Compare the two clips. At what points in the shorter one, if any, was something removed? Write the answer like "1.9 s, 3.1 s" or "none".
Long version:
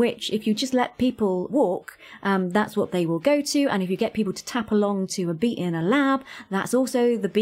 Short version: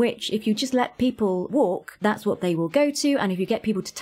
2.0 s